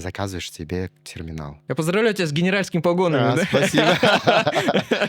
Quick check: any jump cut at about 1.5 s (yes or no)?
yes